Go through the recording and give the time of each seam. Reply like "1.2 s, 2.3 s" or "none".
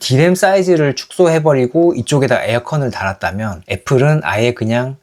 none